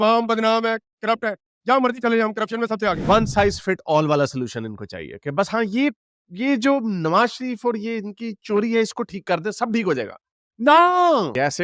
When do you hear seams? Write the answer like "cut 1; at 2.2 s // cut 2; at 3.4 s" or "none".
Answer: cut 1; at 3.1 s